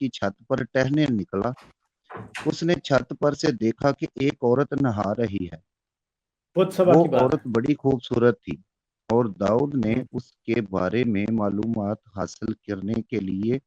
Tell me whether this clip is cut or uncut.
uncut